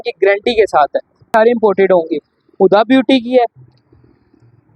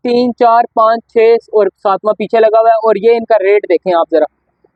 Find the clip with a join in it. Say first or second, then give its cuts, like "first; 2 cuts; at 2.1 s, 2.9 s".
first; 1 cut; at 1.3 s